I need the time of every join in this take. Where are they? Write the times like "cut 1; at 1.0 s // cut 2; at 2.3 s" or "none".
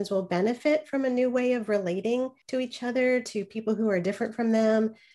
cut 1; at 2.4 s